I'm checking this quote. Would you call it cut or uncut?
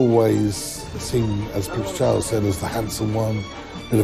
uncut